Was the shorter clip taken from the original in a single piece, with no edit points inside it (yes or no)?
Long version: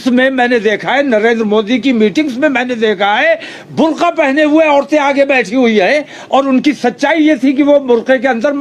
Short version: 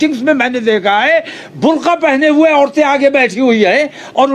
yes